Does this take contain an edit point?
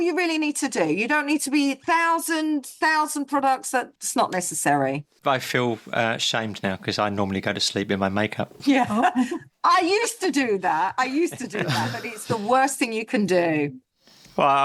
yes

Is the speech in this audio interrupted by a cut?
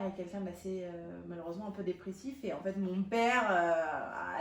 no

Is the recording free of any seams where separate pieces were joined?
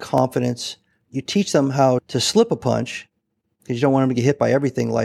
no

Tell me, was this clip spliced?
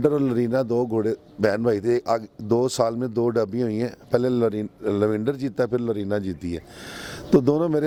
no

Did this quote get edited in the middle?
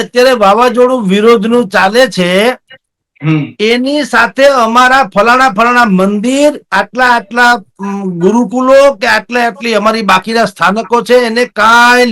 no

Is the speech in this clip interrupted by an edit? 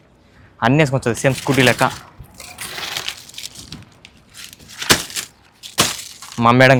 no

